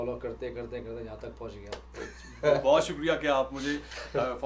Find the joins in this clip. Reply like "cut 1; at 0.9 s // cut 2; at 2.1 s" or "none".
none